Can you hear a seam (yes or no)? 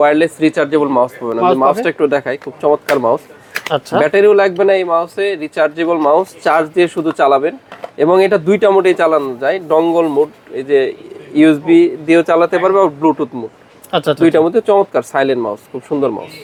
no